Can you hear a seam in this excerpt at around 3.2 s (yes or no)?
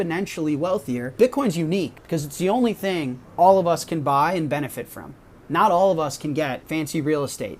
yes